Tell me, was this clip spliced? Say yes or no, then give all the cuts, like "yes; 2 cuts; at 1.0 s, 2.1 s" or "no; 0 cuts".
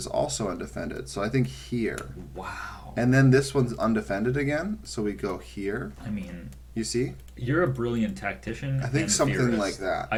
no; 0 cuts